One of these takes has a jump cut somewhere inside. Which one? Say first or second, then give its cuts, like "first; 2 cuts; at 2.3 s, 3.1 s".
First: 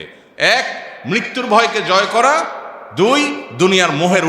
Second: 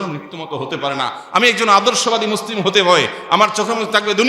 second; 1 cut; at 3.2 s